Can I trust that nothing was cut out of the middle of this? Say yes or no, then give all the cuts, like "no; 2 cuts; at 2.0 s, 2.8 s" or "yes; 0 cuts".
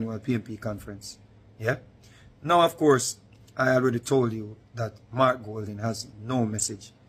yes; 0 cuts